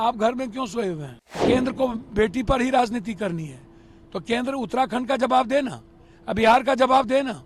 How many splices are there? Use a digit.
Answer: 1